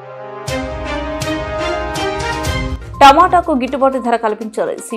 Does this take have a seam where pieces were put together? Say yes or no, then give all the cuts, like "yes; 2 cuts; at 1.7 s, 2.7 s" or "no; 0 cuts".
yes; 1 cut; at 2.7 s